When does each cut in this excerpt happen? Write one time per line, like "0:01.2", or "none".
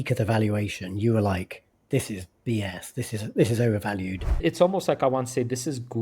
0:04.4